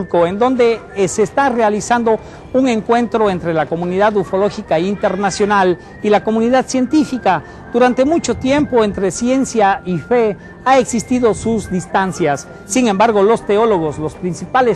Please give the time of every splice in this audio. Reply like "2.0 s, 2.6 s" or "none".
8.9 s

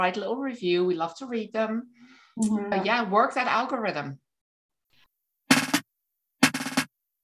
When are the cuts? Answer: 4.7 s

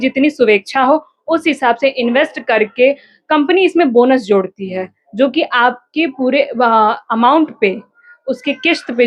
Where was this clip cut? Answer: none

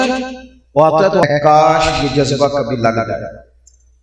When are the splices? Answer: 1.2 s

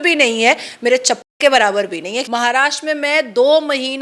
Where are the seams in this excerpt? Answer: 2.2 s

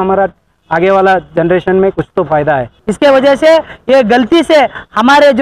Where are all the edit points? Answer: 2.8 s

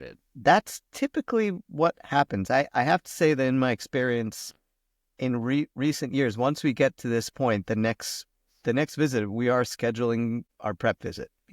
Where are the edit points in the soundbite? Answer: 10.5 s

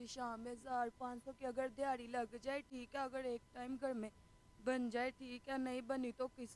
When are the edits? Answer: none

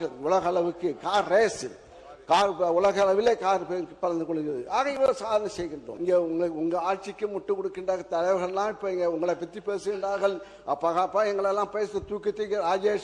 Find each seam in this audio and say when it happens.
5.9 s

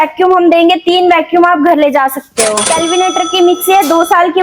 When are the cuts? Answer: 2.6 s

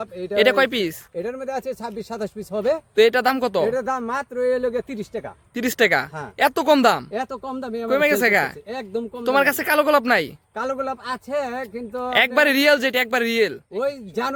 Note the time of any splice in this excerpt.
none

